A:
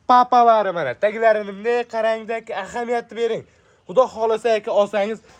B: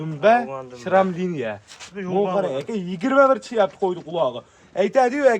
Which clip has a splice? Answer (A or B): B